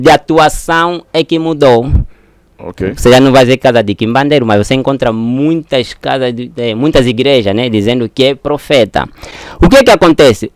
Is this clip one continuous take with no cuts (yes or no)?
yes